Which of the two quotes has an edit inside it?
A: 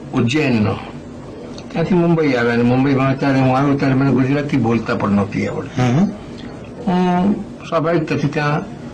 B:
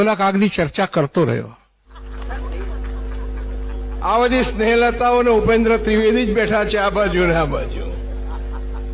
B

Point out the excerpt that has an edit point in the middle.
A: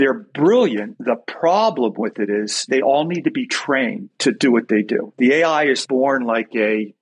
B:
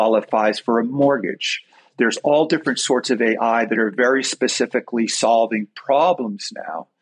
A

